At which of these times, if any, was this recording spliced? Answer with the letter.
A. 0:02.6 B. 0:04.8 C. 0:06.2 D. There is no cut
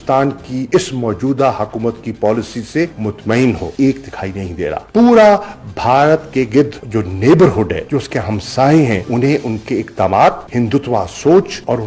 B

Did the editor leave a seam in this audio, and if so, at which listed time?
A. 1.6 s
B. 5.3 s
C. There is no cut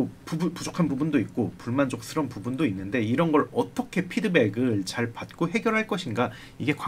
C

